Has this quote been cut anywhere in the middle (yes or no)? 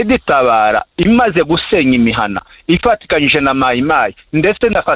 yes